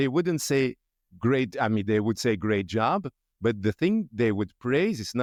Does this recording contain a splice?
no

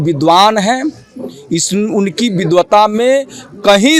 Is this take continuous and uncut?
yes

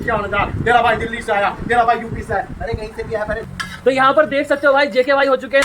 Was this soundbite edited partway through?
yes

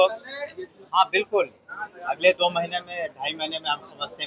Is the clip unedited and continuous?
yes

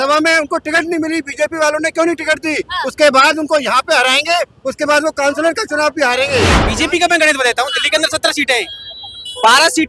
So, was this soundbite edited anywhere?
yes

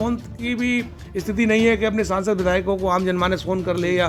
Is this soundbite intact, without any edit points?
yes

